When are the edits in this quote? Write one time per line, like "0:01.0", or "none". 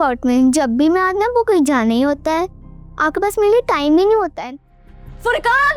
0:04.4